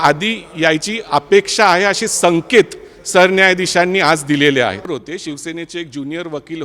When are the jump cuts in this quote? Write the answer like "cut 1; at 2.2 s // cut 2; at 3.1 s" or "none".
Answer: cut 1; at 4.9 s